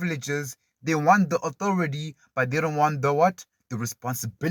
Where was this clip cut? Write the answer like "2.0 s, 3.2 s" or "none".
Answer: none